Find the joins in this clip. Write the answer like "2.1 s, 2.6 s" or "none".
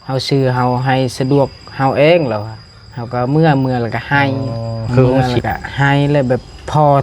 5.2 s